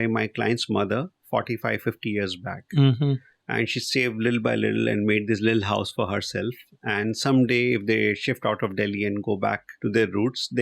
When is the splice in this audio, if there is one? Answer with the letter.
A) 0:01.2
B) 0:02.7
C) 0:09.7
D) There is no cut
C